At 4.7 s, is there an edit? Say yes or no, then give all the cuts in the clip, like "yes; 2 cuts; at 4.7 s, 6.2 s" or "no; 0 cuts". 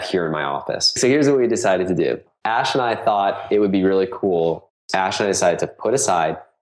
yes; 3 cuts; at 0.9 s, 2.3 s, 4.7 s